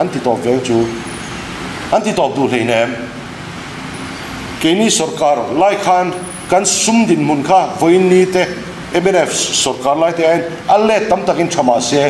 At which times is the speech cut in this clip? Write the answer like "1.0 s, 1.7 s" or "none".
none